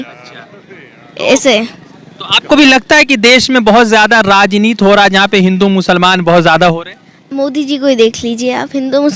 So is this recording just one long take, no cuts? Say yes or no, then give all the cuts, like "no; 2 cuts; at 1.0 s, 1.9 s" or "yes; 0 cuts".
yes; 0 cuts